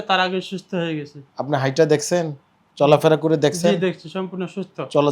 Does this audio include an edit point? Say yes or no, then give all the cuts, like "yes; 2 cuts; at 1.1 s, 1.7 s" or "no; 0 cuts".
no; 0 cuts